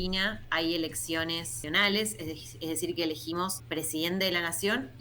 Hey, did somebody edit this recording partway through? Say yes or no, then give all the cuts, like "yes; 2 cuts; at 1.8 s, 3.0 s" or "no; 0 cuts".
yes; 2 cuts; at 1.5 s, 3.6 s